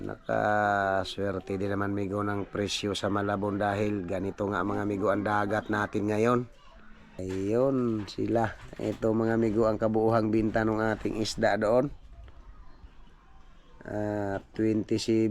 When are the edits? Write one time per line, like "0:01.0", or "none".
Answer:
0:07.1